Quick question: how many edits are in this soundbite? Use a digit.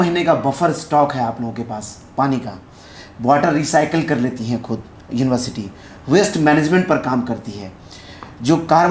0